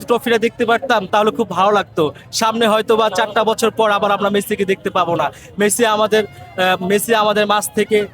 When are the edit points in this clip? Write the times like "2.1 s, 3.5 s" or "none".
1.1 s

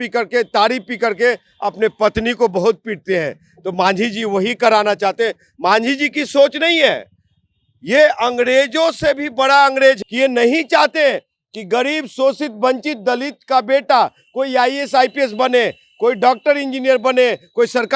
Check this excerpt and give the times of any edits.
10.0 s

